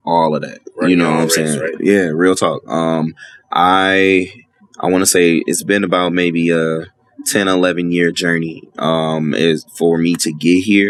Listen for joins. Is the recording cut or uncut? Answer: uncut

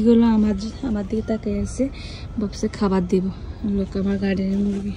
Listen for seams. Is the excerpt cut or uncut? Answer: uncut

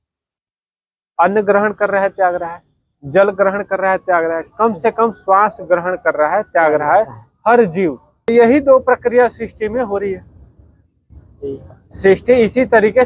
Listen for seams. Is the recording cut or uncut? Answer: cut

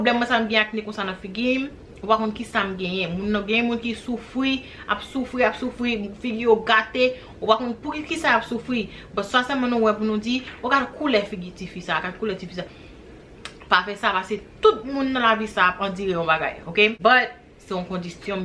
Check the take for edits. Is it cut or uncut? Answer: cut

